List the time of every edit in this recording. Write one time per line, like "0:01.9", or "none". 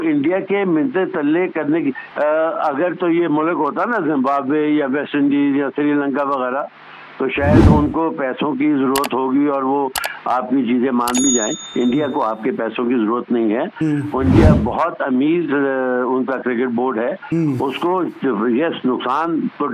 0:02.0